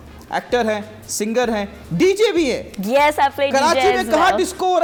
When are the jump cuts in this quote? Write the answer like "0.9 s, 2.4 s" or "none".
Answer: none